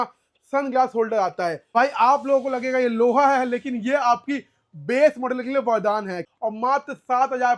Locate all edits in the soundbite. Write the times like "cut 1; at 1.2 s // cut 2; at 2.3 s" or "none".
cut 1; at 1.7 s // cut 2; at 6.2 s